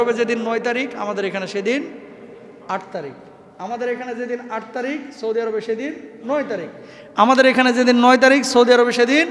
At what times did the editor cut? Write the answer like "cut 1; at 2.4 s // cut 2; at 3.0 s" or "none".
none